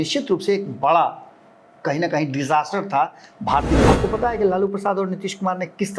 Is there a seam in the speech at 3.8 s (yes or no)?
yes